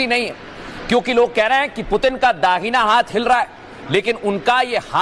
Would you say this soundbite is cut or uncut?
uncut